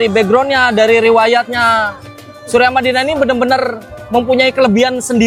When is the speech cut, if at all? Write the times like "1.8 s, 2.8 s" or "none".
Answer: none